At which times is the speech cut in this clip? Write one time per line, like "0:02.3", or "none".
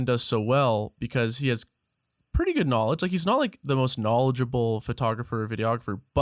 none